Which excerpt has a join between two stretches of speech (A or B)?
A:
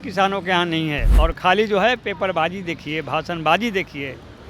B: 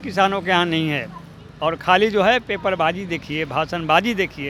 A